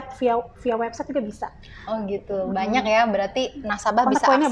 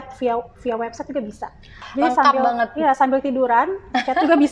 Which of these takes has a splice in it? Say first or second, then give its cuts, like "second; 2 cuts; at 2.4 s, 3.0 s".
second; 1 cut; at 1.8 s